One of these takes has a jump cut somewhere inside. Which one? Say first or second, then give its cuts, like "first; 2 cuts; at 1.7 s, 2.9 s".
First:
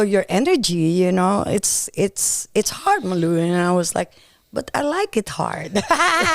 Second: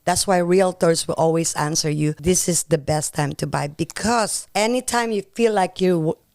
second; 2 cuts; at 2.2 s, 4.4 s